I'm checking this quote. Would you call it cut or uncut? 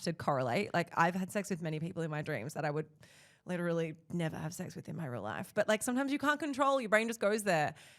uncut